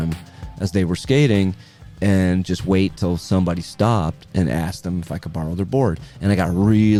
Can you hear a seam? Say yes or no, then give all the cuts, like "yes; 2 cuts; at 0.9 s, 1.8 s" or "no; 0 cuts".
no; 0 cuts